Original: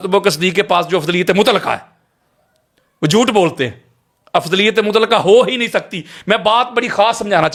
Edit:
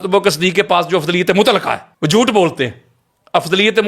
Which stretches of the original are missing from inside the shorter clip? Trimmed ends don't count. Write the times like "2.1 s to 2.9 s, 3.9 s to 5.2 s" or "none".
1.9 s to 2.9 s

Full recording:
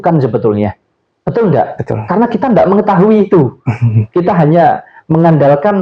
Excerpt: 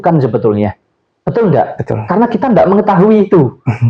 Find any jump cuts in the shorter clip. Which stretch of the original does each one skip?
none

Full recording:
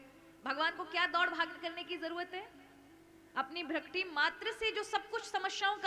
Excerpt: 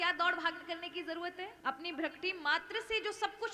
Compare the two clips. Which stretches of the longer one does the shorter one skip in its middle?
2.5 s to 3.3 s

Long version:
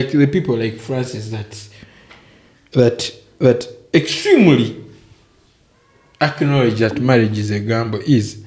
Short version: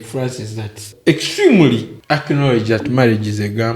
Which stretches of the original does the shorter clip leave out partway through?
1.6 s to 3.7 s, 4.8 s to 6.0 s

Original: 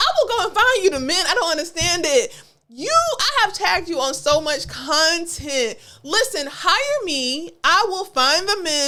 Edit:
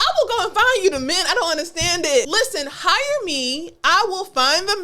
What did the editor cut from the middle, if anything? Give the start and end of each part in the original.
2.3 s to 6.1 s

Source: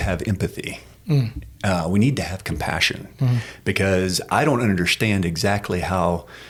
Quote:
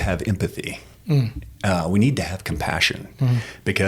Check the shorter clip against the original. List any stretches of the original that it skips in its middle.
none

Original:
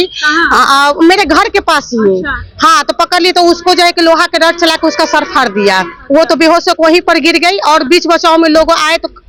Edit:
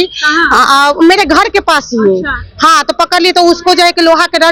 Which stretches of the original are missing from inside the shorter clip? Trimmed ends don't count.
none

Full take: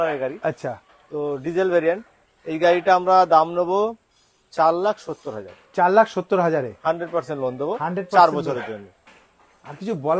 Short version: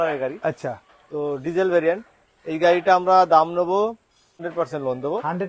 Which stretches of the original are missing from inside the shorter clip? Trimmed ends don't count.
4.5 s to 7.0 s

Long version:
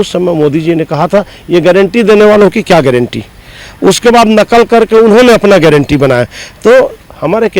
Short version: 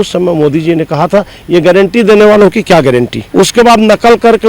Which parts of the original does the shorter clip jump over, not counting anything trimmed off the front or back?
3.2 s to 3.7 s

